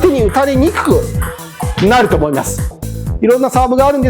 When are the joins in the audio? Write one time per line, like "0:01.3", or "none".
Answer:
0:02.7